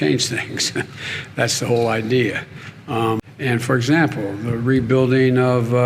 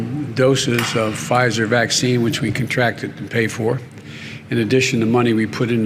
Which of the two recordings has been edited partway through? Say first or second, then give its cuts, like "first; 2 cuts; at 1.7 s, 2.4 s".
first; 1 cut; at 3.3 s